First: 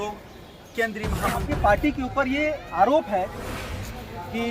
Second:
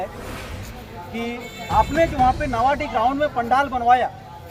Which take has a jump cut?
first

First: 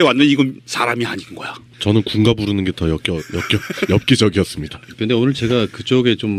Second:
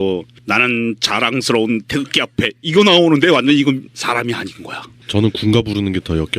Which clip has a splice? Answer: second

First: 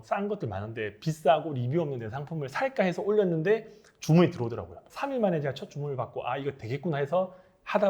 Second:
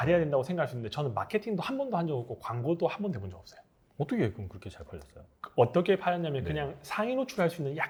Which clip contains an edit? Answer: first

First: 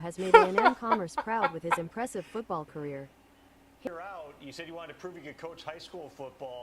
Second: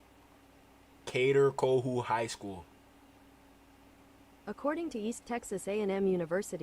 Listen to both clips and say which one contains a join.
first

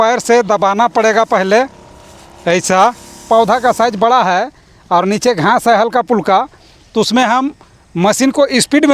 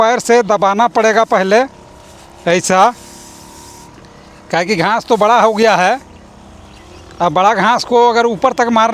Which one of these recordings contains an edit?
first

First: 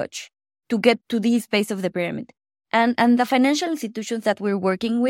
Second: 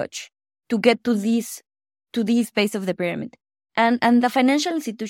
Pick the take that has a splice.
first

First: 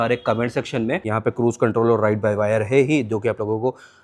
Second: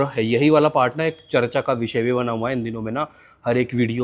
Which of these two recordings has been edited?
first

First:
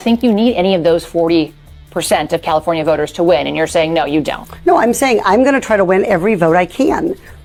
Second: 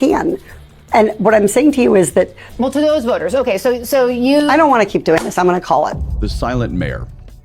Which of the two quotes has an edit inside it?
second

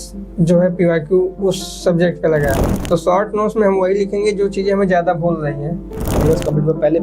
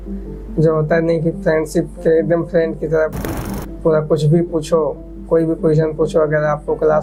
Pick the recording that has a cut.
first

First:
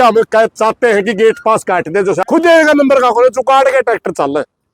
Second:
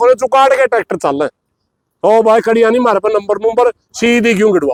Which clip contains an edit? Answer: first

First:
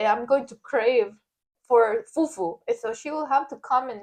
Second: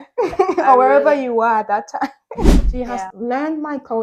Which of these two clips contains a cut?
second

